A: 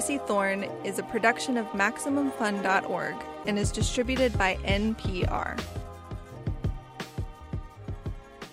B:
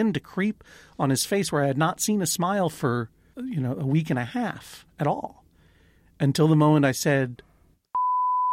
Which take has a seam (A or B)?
B